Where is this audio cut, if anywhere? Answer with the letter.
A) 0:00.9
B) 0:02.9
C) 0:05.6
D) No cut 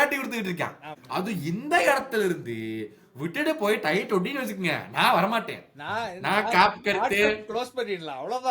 A